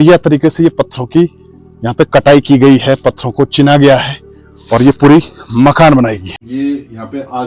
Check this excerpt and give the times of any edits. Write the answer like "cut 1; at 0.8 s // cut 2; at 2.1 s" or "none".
cut 1; at 6.3 s